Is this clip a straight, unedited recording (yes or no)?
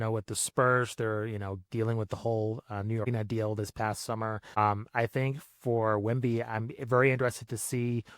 no